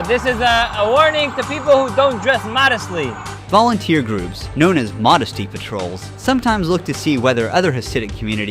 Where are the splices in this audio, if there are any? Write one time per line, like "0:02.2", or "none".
0:03.3